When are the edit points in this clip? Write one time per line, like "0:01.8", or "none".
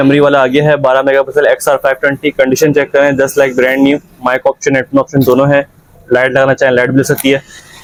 none